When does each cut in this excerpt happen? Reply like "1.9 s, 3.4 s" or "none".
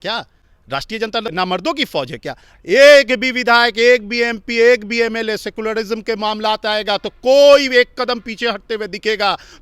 1.3 s

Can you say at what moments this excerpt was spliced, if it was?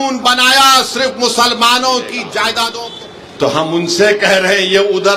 2.7 s

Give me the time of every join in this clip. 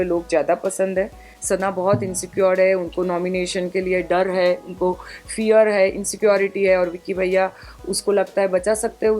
1.3 s

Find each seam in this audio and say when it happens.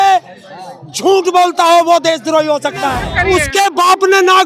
3.0 s

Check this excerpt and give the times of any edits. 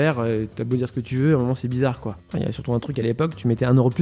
2.2 s

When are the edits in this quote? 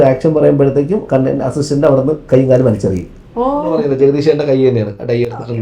3.7 s

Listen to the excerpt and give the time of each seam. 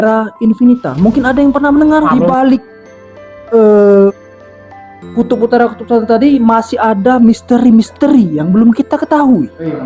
2.1 s

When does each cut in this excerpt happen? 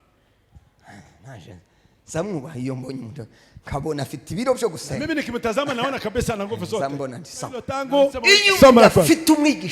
7.8 s

